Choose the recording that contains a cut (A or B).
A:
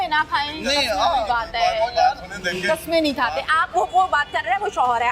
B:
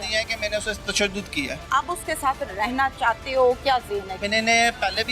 B